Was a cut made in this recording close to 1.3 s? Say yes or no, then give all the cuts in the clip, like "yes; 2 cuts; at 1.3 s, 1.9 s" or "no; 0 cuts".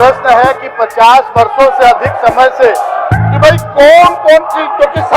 no; 1 cut; at 3.1 s